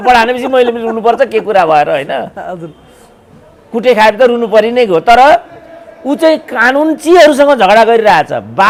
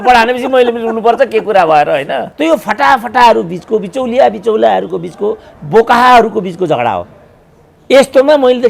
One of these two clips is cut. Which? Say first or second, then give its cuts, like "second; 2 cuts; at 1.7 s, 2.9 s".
second; 1 cut; at 2.3 s